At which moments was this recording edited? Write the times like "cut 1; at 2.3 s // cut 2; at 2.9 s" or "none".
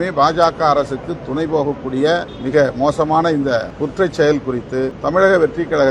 cut 1; at 2.3 s // cut 2; at 3.7 s // cut 3; at 5.0 s